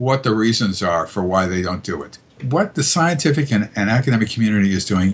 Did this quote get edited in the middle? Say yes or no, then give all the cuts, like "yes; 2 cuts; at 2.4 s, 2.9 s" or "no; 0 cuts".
yes; 1 cut; at 2.3 s